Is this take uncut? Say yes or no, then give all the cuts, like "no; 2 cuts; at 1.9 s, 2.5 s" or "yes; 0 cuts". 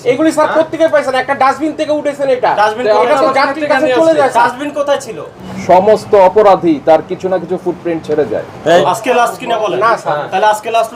no; 2 cuts; at 5.3 s, 8.8 s